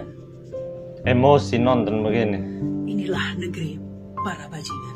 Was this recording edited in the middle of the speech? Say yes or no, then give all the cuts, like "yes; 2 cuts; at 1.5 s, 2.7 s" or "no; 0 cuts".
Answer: no; 0 cuts